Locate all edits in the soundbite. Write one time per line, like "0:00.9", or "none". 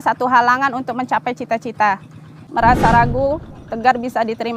0:02.4